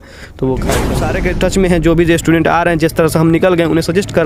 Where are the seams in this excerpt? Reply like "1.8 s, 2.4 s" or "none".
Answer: 1.1 s